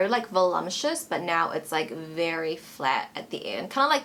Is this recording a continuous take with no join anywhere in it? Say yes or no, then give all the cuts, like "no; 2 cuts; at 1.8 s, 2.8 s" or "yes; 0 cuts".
yes; 0 cuts